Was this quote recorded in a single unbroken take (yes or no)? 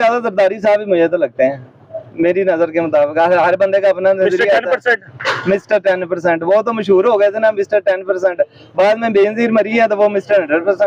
yes